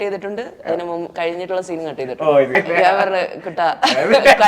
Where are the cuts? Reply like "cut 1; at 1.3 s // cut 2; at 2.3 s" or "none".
cut 1; at 2.6 s